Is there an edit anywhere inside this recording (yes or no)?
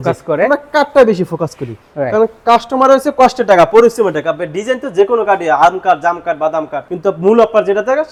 no